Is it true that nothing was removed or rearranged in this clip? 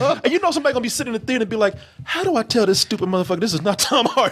yes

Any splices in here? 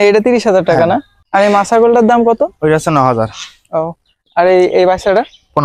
yes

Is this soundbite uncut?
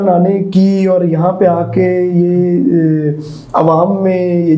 yes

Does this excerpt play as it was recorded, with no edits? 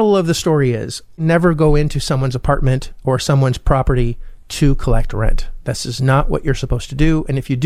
no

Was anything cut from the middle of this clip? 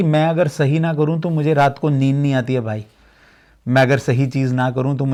no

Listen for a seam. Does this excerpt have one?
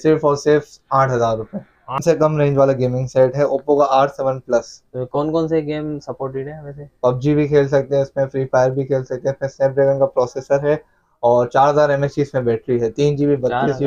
yes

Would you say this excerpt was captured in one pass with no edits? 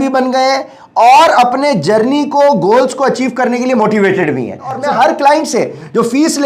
no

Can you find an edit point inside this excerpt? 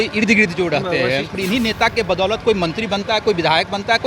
yes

